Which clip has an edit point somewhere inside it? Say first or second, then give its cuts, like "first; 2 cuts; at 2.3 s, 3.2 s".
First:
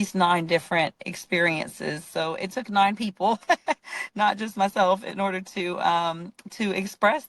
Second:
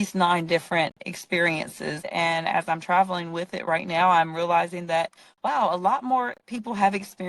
second; 1 cut; at 2.1 s